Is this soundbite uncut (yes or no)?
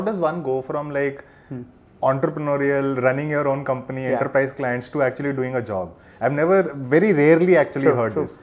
yes